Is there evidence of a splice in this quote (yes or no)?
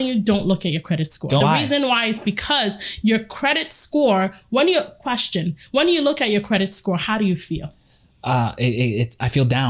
yes